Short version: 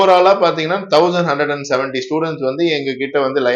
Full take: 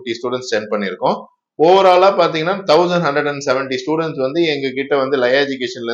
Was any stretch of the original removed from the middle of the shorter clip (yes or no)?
no